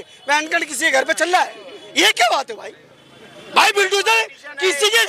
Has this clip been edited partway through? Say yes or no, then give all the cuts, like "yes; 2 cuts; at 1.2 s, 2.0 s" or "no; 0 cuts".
no; 0 cuts